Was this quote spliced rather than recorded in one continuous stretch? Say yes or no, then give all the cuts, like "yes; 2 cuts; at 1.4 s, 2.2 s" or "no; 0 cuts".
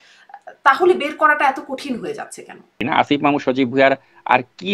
yes; 1 cut; at 2.8 s